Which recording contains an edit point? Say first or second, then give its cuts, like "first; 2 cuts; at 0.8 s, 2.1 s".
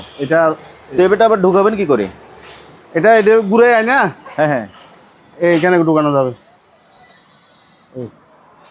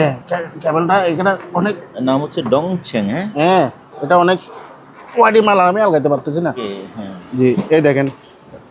second; 1 cut; at 6.6 s